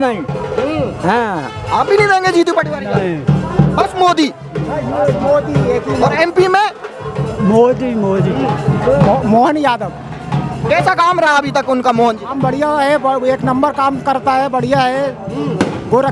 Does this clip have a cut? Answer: no; 0 cuts

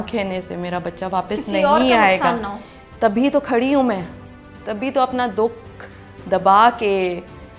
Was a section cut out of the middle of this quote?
no; 0 cuts

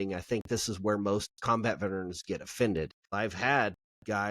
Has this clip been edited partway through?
yes; 1 cut; at 3.0 s

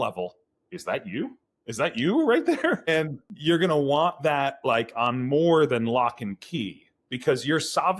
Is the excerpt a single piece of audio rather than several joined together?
no; 1 cut; at 3.2 s

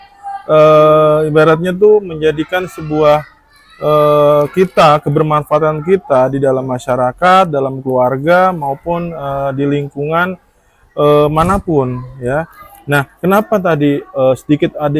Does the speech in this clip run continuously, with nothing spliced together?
yes; 0 cuts

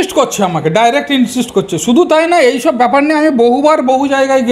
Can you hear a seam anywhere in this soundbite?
no; 0 cuts

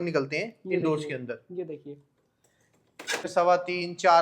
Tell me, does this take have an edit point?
yes; 1 cut; at 3.3 s

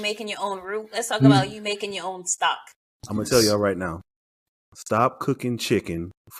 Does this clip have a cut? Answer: yes; 1 cut; at 2.8 s

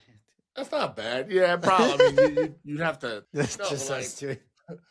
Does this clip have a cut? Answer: yes; 1 cut; at 3.0 s

